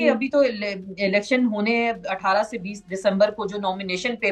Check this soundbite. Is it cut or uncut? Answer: uncut